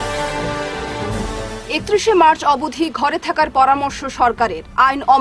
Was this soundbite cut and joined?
yes; 1 cut; at 1.5 s

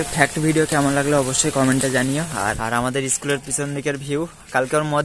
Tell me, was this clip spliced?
yes; 1 cut; at 2.6 s

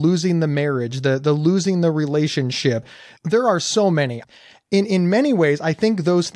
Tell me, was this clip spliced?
yes; 2 cuts; at 2.9 s, 4.2 s

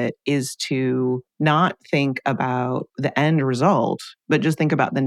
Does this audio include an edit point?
yes; 3 cuts; at 1.3 s, 2.9 s, 4.1 s

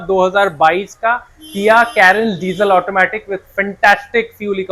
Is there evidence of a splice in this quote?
no; 0 cuts

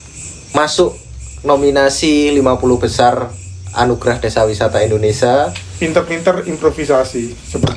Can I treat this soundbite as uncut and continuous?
no; 1 cut; at 5.7 s

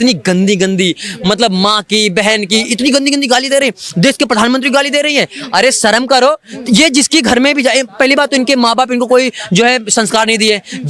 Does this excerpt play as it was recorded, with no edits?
yes; 0 cuts

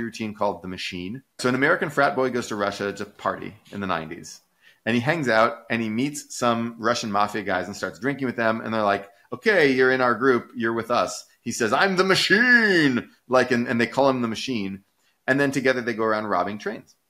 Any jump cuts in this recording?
yes; 1 cut; at 1.4 s

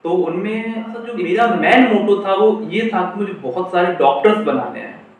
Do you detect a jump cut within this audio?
yes; 1 cut; at 1.1 s

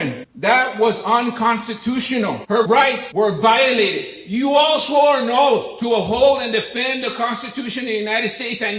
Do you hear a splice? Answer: yes; 1 cut; at 2.6 s

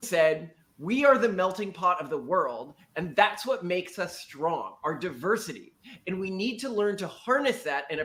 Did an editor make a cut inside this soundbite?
no; 0 cuts

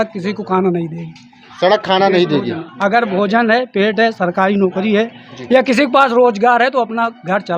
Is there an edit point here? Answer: no; 0 cuts

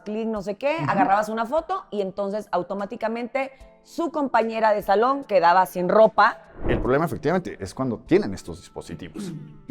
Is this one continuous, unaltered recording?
no; 1 cut; at 6.5 s

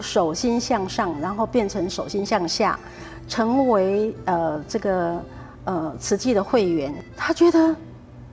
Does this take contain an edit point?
yes; 1 cut; at 7.0 s

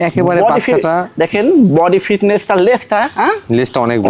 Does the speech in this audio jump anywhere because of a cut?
no; 0 cuts

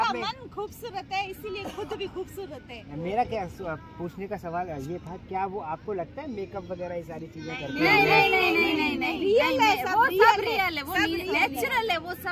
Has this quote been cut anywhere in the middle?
no; 0 cuts

